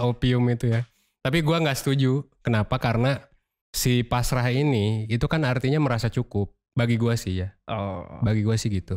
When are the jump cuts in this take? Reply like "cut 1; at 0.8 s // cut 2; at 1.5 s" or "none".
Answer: none